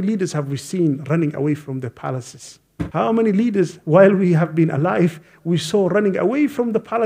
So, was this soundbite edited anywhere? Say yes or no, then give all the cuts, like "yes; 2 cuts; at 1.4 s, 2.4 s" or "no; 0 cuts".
yes; 1 cut; at 2.9 s